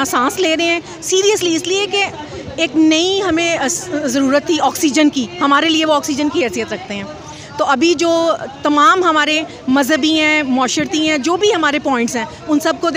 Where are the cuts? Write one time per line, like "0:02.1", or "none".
none